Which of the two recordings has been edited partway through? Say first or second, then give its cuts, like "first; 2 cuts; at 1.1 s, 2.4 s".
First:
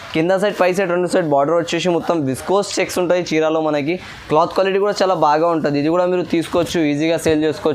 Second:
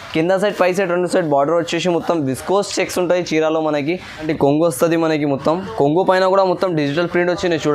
second; 1 cut; at 4.2 s